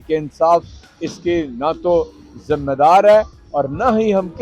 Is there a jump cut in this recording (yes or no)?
no